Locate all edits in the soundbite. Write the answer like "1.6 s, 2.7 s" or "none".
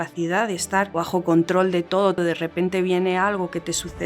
0.9 s, 2.2 s